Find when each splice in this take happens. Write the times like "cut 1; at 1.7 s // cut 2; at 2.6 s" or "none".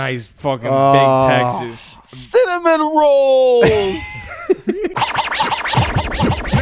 cut 1; at 4.9 s